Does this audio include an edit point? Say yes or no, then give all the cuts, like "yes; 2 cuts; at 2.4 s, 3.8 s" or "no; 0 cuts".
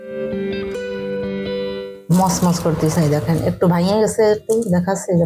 no; 0 cuts